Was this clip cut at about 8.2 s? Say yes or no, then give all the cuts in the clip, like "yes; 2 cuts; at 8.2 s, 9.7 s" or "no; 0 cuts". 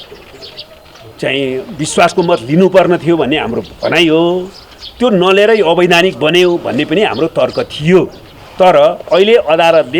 no; 0 cuts